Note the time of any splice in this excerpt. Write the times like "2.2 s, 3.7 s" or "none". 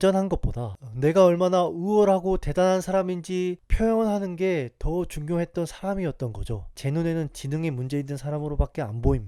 none